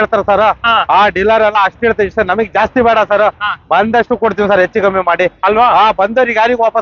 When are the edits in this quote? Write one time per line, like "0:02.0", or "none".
none